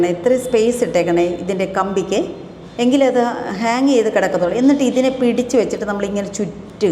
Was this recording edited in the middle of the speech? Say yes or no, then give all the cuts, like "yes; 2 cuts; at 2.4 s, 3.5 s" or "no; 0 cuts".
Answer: no; 0 cuts